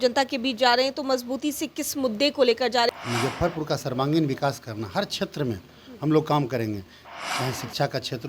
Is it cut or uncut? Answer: cut